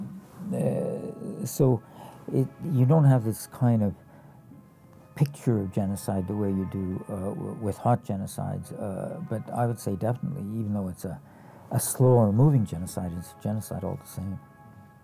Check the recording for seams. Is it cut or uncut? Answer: uncut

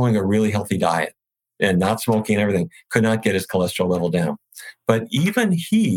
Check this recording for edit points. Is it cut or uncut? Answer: cut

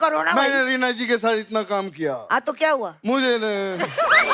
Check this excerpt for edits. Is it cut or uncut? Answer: uncut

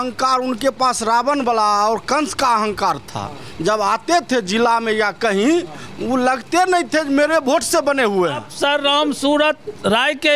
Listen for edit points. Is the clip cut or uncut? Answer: cut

